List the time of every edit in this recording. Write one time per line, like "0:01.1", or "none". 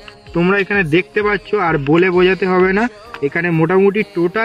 none